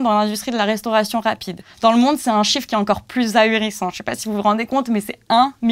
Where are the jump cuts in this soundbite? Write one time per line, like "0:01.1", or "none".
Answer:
0:01.6

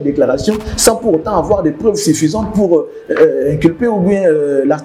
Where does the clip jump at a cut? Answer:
none

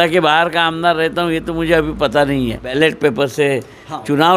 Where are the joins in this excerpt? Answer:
0:02.8

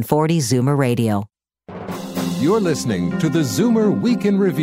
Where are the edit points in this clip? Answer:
0:01.9

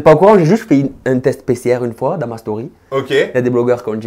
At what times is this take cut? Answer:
none

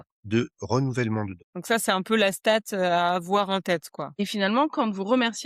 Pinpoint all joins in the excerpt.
0:04.1

